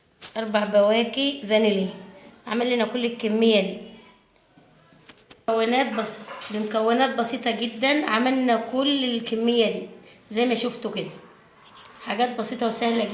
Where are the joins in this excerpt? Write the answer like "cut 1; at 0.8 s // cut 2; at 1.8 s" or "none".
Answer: cut 1; at 5.4 s